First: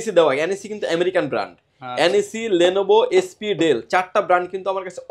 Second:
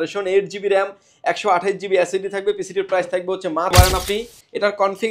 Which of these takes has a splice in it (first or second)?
second